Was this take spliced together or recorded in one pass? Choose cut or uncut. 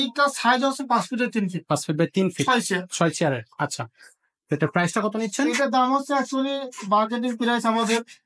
uncut